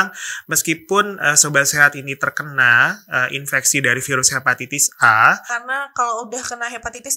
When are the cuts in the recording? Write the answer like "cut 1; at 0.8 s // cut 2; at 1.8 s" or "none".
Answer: cut 1; at 5.6 s